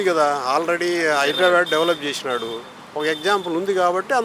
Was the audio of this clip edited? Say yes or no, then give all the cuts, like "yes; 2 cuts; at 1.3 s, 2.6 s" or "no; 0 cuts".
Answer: no; 0 cuts